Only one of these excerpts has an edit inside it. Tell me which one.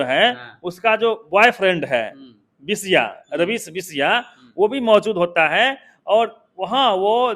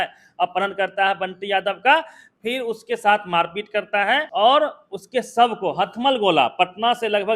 second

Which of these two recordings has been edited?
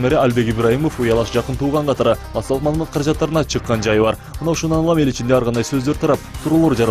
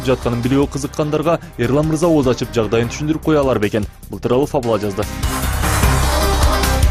first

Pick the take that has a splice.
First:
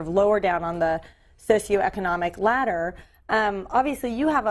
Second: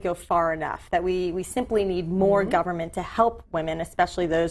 first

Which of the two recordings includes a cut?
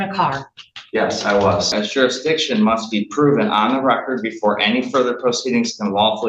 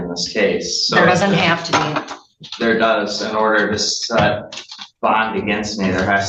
first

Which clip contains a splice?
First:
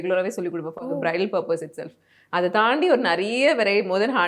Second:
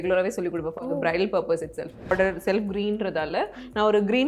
second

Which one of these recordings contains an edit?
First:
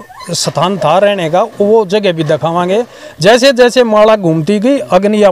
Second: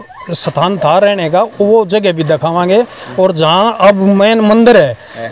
first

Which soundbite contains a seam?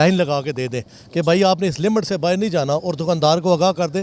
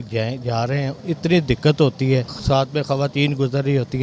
second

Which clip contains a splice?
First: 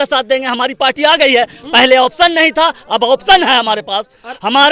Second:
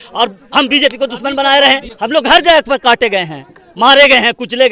second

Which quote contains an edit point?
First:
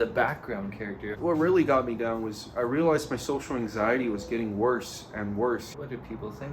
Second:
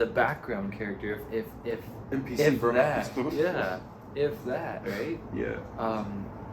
first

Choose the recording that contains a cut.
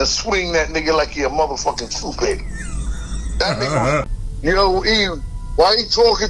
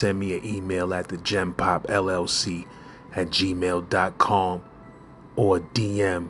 first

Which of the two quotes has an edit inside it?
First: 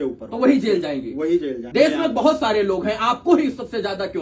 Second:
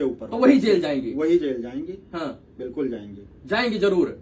first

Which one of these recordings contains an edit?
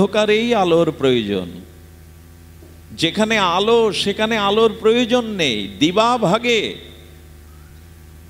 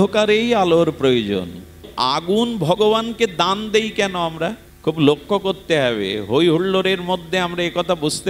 second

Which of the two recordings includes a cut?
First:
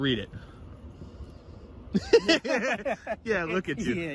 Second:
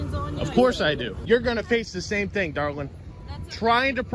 second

